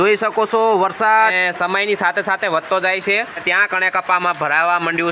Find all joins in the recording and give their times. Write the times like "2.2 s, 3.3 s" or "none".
1.4 s, 3.5 s